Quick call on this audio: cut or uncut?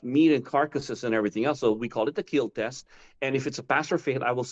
uncut